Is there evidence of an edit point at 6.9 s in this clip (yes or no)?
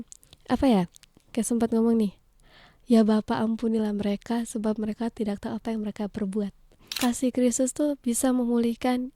yes